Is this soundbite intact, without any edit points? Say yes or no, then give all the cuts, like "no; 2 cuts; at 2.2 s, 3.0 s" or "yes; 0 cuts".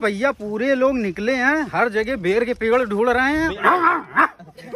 no; 1 cut; at 3.3 s